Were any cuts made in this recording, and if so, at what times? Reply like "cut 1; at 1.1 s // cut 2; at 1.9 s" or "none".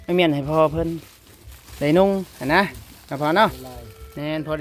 none